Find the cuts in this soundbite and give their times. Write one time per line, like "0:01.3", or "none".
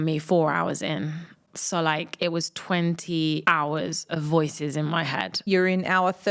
0:03.4
0:05.4